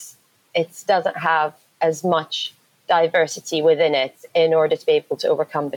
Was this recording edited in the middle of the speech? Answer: no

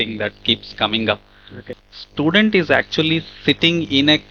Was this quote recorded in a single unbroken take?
no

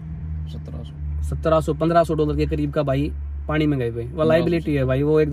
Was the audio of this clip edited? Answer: no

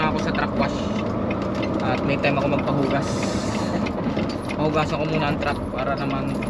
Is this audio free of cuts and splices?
yes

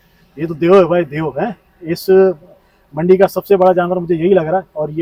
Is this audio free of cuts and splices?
yes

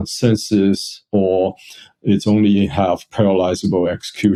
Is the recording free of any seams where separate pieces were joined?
yes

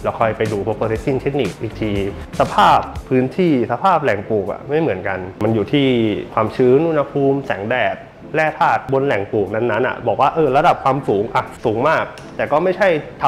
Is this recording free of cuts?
no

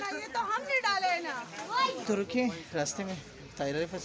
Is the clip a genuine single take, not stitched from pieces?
yes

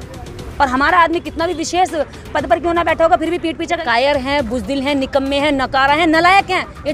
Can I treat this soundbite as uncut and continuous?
no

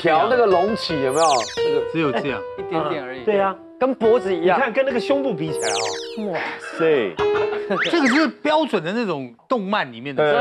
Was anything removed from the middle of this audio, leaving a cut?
no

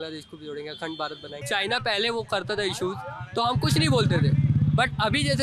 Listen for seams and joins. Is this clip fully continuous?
no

